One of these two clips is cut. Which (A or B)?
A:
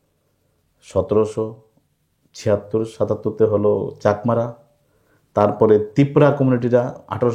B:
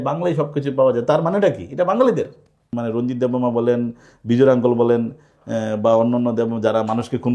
B